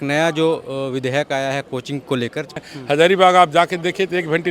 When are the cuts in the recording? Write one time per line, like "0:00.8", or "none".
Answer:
0:02.7